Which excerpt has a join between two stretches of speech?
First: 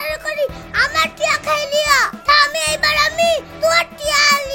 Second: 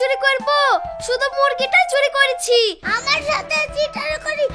second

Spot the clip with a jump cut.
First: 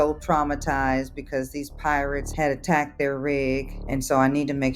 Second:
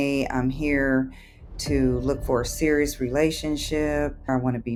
first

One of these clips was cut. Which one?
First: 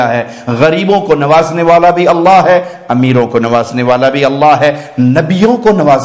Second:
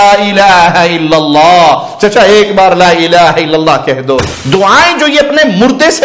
second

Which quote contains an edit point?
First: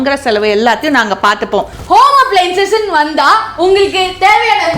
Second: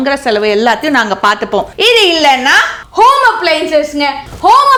first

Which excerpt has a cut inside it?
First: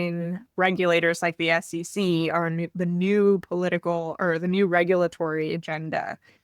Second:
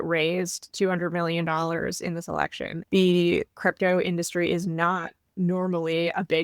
second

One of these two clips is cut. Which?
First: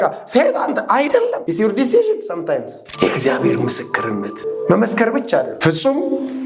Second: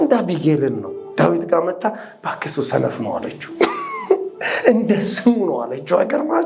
first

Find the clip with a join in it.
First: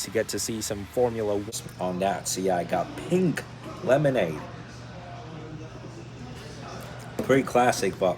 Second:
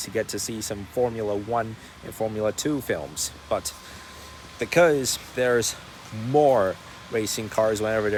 first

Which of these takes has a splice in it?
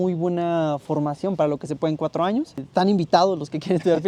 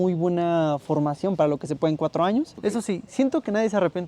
second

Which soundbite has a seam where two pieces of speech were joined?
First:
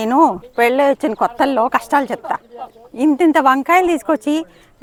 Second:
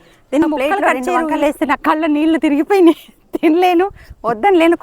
second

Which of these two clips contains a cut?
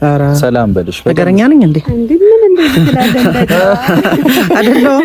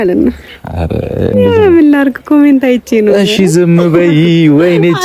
second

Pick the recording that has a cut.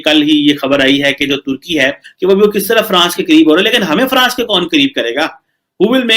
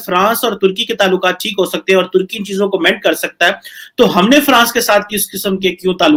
first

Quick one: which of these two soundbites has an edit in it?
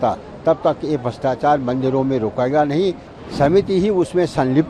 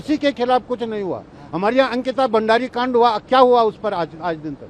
first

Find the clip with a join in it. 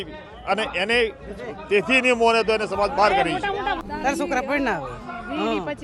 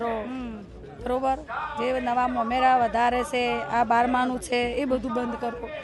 first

